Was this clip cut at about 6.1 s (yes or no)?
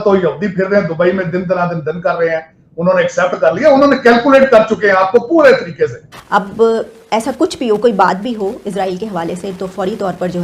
yes